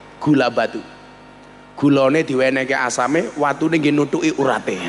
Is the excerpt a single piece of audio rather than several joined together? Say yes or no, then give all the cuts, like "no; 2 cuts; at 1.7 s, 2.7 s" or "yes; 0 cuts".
yes; 0 cuts